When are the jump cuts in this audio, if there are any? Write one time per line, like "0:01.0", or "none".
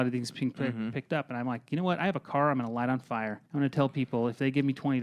0:03.4